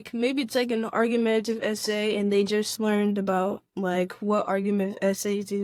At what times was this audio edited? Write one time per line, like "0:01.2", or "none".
none